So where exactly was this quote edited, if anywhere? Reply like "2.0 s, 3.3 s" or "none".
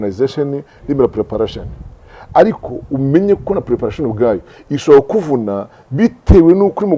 none